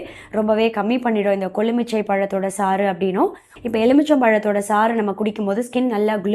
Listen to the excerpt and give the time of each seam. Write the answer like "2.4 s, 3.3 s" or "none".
3.5 s